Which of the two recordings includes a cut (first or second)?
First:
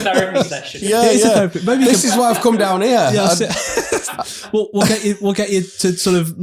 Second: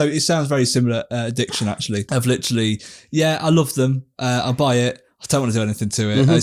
second